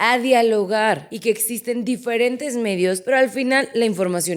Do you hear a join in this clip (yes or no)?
yes